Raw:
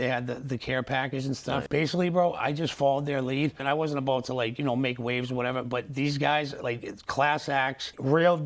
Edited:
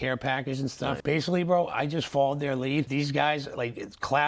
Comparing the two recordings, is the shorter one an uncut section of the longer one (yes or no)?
no